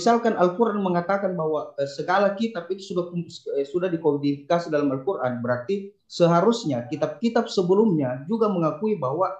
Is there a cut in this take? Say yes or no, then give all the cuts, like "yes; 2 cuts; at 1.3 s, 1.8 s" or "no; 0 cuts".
no; 0 cuts